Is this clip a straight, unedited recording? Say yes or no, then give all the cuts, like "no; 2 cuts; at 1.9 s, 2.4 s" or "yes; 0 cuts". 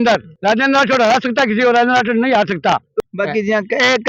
no; 1 cut; at 3.0 s